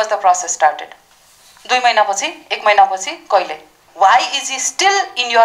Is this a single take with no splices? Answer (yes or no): no